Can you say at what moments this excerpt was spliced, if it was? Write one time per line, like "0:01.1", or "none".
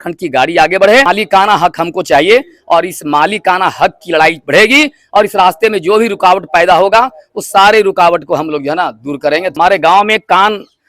0:01.1
0:09.5